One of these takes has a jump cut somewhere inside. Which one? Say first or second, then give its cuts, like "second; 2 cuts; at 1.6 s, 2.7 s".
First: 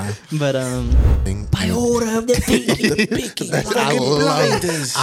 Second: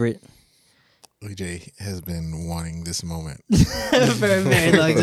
first; 1 cut; at 1.1 s